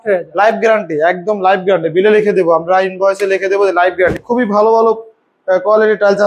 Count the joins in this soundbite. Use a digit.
1